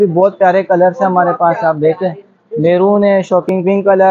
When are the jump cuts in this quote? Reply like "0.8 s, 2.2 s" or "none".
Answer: none